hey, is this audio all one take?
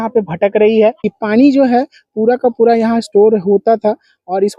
no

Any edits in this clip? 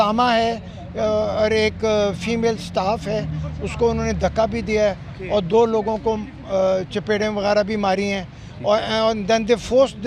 no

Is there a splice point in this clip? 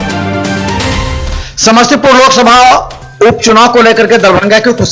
yes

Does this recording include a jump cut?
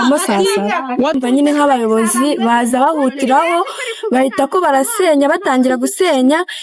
yes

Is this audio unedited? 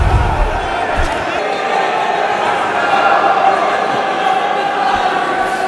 no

